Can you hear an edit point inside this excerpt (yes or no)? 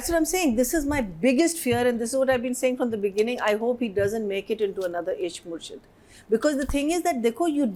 no